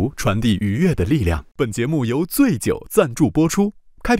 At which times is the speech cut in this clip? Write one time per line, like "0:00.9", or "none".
0:01.4